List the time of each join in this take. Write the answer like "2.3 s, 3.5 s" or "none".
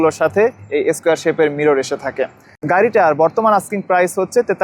2.4 s